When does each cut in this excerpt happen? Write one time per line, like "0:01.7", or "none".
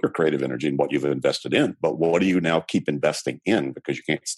none